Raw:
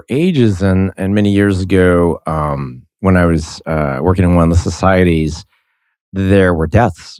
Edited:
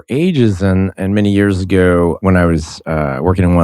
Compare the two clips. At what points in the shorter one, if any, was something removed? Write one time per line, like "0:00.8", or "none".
0:02.2